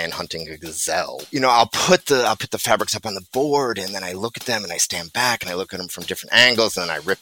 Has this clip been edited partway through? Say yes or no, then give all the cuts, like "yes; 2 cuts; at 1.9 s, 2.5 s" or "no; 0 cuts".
yes; 1 cut; at 1.2 s